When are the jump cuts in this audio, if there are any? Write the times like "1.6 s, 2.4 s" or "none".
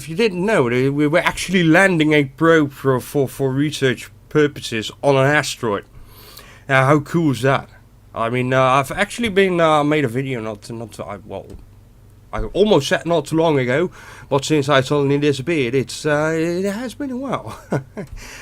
16.5 s

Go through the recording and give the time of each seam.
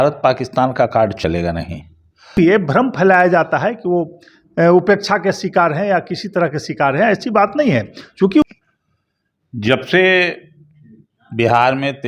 2.3 s, 8.4 s

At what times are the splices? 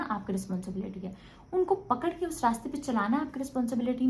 none

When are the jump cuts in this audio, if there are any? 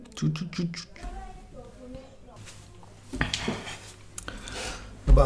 2.4 s

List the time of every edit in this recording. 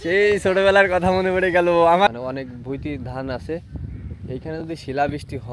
2.1 s

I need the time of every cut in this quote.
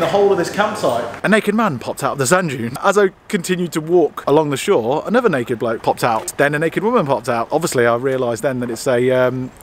1.1 s, 2.8 s, 6.3 s, 7.5 s

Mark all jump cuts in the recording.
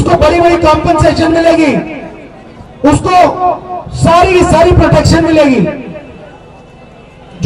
none

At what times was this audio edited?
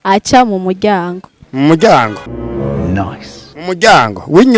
2.2 s, 3.6 s

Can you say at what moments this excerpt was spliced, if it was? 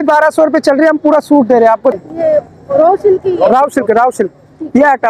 2.0 s

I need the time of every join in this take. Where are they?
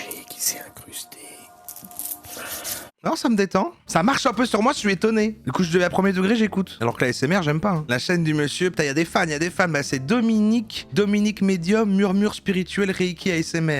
2.9 s, 3.8 s, 5.4 s, 6.7 s, 7.8 s

